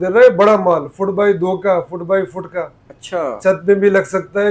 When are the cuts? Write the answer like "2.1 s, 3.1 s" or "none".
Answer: none